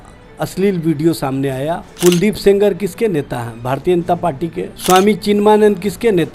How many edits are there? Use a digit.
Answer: 2